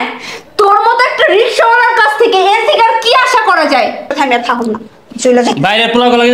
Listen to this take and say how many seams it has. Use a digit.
1